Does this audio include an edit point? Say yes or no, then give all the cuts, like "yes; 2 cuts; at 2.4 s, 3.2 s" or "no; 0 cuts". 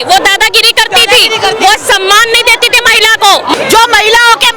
yes; 1 cut; at 3.6 s